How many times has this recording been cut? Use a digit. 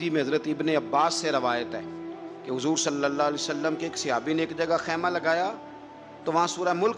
0